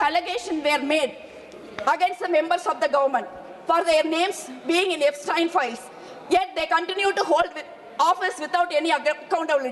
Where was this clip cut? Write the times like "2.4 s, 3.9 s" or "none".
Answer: none